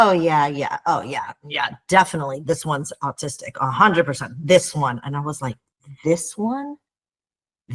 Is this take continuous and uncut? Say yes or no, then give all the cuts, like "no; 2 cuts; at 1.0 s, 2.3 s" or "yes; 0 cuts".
yes; 0 cuts